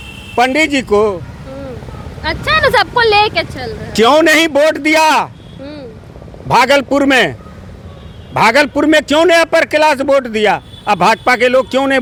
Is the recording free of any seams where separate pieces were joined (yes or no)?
yes